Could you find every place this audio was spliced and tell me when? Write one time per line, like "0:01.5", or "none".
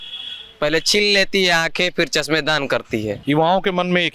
0:03.2